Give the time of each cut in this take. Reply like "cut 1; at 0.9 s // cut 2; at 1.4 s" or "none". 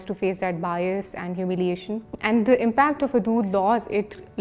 cut 1; at 2.3 s